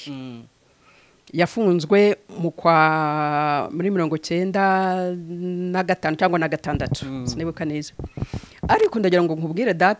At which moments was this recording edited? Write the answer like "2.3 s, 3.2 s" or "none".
none

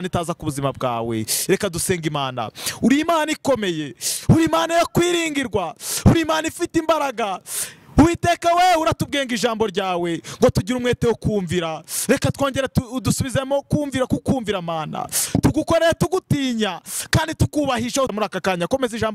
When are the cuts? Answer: 18.1 s

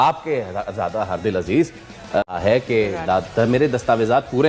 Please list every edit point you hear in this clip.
2.3 s

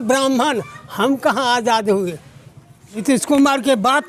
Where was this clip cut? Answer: 3.0 s

